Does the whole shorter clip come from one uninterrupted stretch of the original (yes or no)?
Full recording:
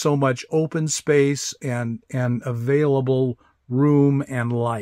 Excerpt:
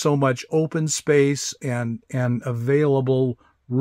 yes